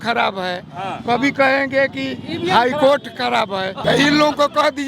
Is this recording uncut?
no; 1 cut; at 3.8 s

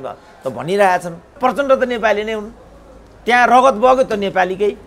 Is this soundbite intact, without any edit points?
no; 1 cut; at 1.4 s

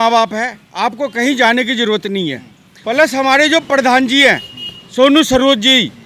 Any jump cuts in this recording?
yes; 1 cut; at 2.8 s

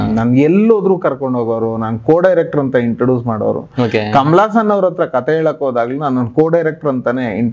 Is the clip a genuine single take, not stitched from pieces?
yes; 0 cuts

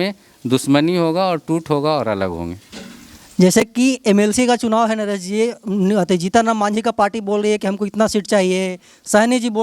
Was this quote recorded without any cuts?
yes; 0 cuts

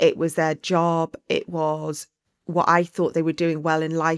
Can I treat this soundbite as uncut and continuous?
yes; 0 cuts

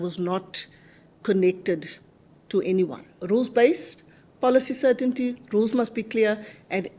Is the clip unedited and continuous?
no; 1 cut; at 3.1 s

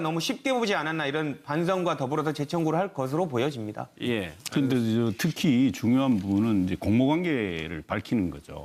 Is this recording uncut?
no; 1 cut; at 5.4 s

